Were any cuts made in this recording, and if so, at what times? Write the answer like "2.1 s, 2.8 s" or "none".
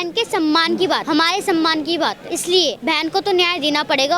1.0 s, 2.6 s